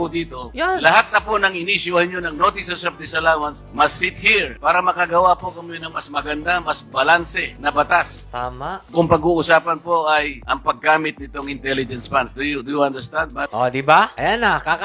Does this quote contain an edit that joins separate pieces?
no; 0 cuts

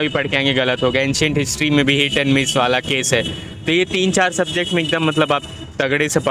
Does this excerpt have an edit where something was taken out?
no; 0 cuts

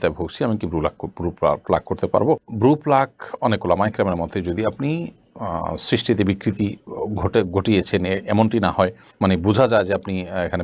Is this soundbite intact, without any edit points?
yes; 0 cuts

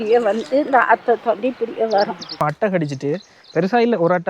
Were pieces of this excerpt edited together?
yes; 1 cut; at 2.4 s

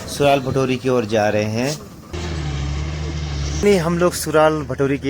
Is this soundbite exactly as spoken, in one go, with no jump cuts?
no; 2 cuts; at 2.1 s, 3.6 s

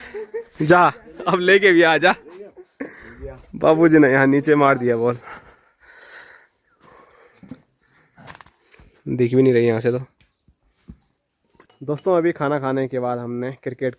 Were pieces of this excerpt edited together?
no; 0 cuts

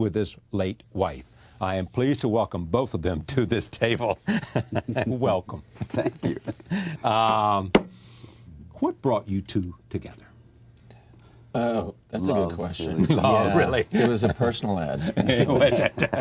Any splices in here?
yes; 1 cut; at 14.6 s

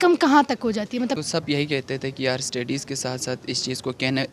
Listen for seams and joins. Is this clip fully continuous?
no; 1 cut; at 1.2 s

